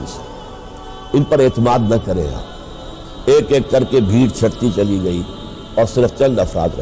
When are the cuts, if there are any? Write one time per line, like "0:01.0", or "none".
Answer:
0:03.0